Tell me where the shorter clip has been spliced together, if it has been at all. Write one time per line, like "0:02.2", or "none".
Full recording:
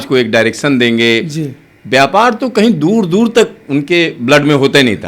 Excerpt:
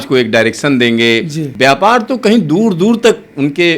0:01.4